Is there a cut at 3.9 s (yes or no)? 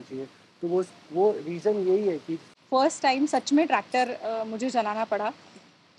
no